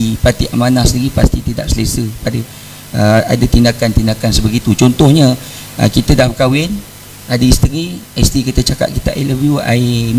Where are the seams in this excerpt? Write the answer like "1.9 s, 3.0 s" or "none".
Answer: none